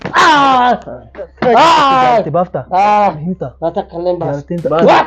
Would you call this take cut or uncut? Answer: cut